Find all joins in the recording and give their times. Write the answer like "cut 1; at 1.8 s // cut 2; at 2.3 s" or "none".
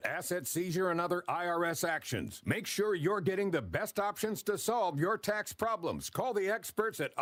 none